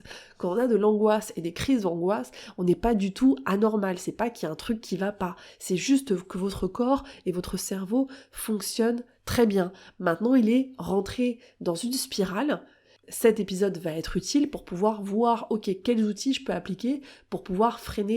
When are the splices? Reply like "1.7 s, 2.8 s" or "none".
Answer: 13.0 s